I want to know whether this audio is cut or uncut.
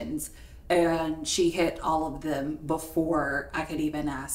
uncut